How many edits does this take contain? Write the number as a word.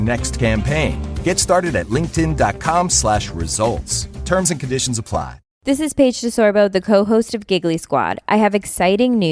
one